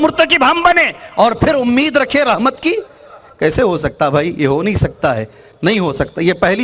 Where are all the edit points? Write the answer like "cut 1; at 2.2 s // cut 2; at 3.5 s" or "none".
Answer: none